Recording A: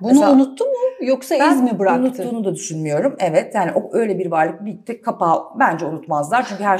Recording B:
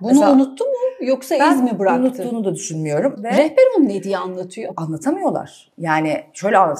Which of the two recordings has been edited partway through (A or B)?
B